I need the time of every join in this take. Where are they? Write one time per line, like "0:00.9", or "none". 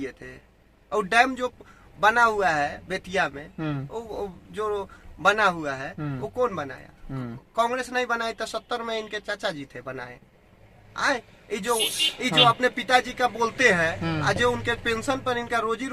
none